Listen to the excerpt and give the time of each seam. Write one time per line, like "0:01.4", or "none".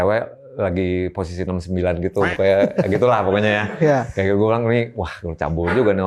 none